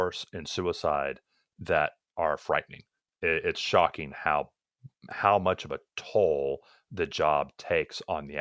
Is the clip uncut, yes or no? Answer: yes